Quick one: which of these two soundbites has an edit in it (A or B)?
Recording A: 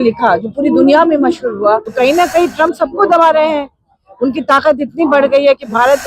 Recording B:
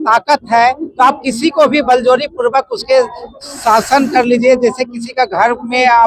A